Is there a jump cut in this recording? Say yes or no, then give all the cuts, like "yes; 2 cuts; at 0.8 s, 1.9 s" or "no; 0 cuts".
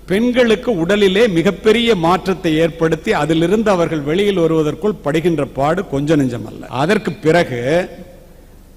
no; 0 cuts